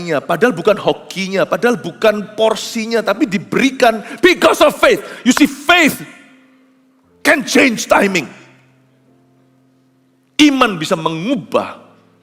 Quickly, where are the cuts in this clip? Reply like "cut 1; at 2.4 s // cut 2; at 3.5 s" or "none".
cut 1; at 2.3 s